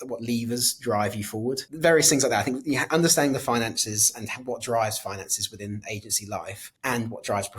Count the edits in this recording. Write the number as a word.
two